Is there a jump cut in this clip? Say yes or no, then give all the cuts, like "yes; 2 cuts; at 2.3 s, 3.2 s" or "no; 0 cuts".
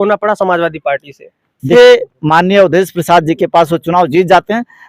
yes; 1 cut; at 1.7 s